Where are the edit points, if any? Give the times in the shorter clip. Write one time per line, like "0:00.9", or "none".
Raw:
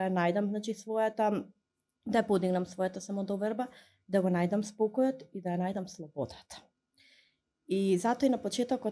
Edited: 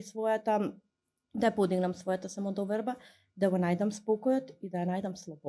none